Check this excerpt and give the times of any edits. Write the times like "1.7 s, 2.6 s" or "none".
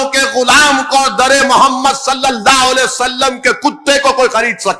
none